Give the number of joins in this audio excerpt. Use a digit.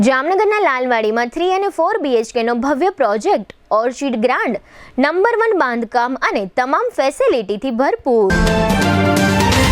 1